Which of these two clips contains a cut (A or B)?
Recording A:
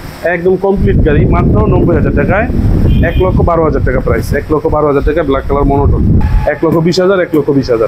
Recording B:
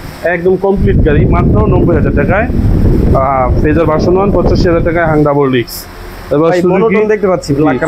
A